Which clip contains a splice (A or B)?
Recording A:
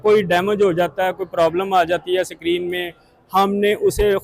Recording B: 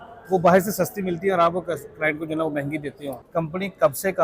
B